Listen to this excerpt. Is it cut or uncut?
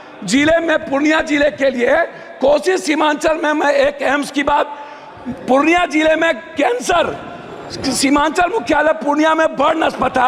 uncut